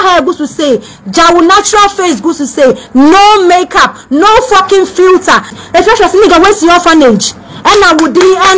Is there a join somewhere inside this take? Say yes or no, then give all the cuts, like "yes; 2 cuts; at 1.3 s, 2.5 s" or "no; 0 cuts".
yes; 1 cut; at 5.6 s